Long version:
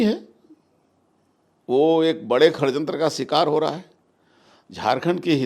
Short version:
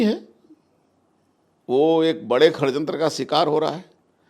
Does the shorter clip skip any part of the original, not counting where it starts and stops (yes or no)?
no